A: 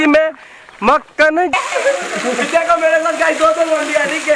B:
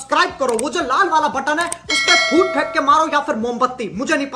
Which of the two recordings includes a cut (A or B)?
A